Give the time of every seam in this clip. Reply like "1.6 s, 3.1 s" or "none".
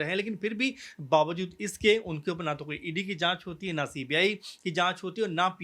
none